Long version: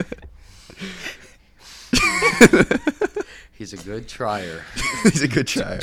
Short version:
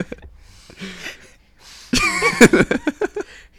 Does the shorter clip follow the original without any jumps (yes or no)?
yes